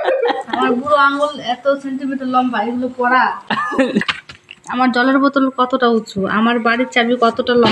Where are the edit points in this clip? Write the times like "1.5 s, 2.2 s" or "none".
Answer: 4.0 s